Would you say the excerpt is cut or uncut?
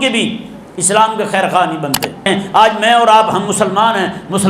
cut